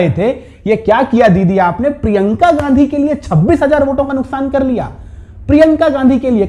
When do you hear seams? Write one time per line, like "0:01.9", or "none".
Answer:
none